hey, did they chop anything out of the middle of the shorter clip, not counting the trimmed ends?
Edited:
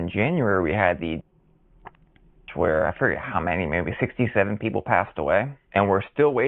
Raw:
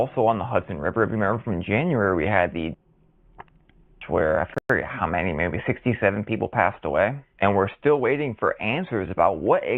yes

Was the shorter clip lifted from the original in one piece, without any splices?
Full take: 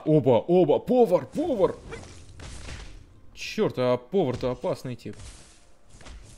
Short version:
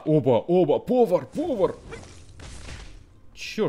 yes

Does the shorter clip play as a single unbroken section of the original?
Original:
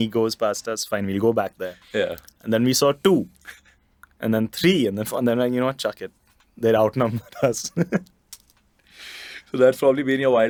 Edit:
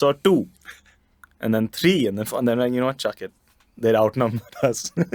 yes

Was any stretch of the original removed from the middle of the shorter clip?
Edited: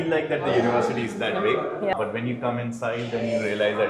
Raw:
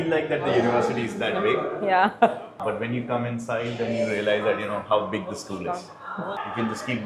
yes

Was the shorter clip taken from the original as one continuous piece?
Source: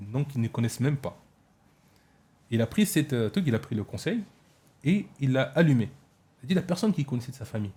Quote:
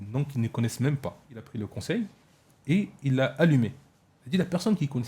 no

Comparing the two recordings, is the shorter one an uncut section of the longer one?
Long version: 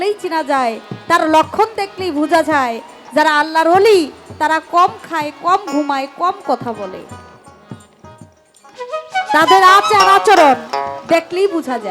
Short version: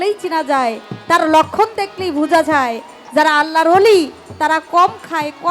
yes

